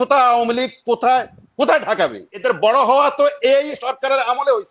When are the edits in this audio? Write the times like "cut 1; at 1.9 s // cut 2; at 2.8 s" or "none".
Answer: cut 1; at 2.3 s